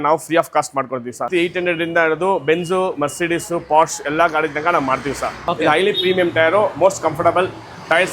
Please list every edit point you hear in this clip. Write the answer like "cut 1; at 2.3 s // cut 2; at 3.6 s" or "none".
cut 1; at 1.3 s // cut 2; at 5.4 s